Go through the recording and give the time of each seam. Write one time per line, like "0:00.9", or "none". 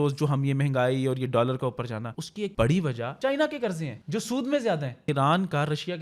0:02.4
0:03.1
0:03.9
0:05.0